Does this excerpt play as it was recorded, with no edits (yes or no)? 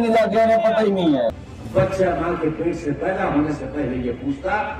no